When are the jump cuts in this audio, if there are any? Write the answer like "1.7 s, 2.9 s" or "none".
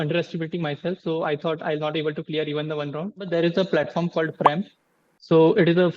3.2 s